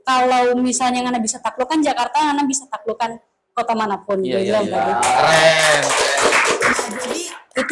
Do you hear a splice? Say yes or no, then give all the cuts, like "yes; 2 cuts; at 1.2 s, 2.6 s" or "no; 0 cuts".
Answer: no; 0 cuts